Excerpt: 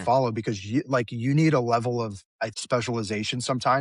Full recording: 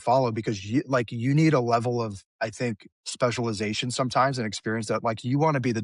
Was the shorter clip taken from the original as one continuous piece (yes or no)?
no